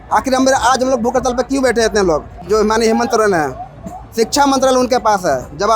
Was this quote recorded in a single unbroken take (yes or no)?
no